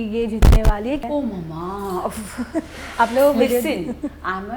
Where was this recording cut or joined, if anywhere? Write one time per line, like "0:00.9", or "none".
0:01.0